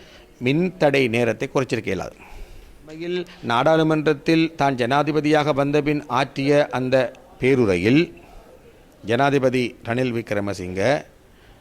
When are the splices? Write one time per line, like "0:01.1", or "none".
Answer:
0:03.1

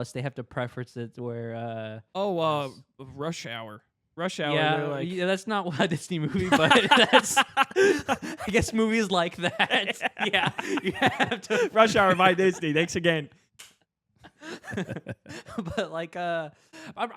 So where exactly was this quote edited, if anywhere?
0:02.1

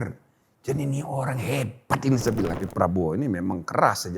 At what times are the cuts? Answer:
0:02.6

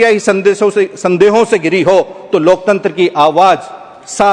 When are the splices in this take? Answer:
none

